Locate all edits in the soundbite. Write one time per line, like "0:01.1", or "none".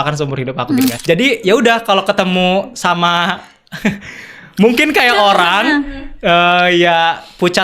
0:01.0

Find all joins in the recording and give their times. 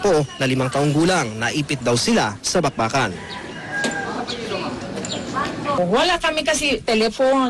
0:04.7

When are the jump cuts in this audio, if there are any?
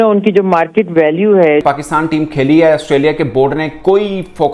0:01.6

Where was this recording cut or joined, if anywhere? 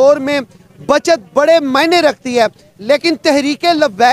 none

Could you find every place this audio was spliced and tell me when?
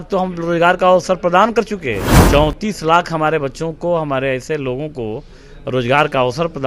0:02.1

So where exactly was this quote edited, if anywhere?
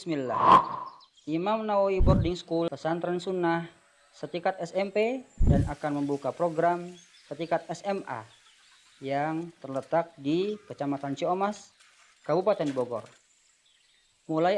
0:02.7

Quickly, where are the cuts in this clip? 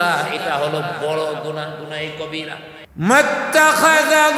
0:02.8

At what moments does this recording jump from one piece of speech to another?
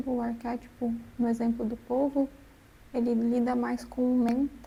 none

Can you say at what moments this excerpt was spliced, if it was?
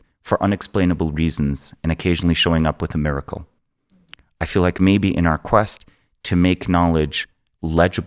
none

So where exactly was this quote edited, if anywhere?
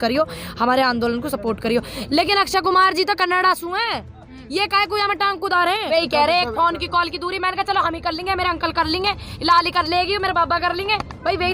0:05.9

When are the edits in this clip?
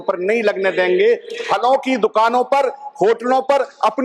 none

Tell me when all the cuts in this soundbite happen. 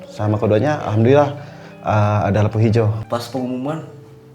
0:03.0

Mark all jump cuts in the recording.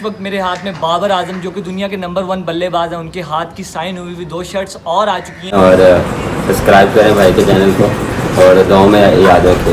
0:05.5

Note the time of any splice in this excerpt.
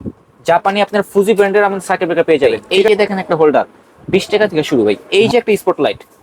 0:02.7
0:05.0

